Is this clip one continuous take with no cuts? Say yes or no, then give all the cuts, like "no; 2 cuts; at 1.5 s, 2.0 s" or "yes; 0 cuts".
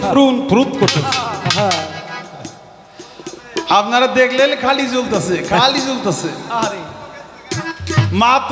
yes; 0 cuts